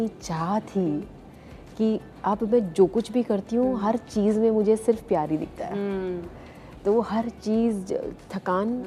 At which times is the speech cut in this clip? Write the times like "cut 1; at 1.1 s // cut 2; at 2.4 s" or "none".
none